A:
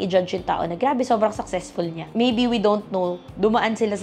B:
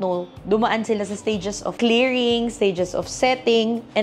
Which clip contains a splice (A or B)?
A